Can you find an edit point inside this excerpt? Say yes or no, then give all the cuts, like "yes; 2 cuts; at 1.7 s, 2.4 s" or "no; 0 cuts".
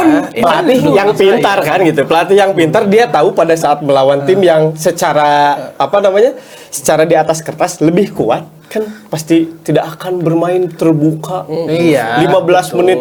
no; 0 cuts